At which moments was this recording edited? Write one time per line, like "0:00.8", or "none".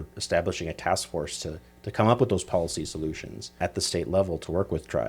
0:03.6